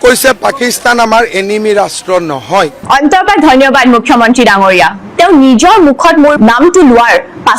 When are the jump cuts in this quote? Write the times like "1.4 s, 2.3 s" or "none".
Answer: 5.0 s, 6.4 s